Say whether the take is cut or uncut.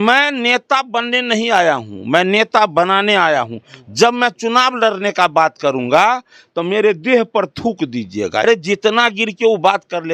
cut